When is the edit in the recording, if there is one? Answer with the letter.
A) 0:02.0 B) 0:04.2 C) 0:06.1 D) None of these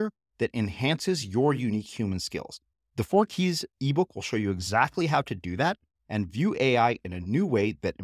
D